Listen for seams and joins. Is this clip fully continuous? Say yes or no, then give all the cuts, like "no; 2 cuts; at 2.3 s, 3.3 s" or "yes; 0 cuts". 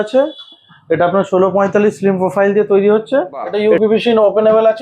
no; 1 cut; at 3.5 s